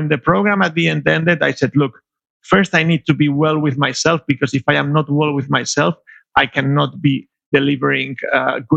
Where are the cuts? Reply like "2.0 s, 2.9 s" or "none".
7.4 s